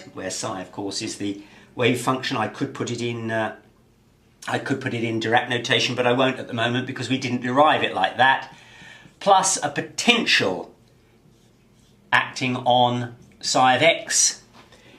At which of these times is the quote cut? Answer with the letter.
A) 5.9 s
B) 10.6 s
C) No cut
C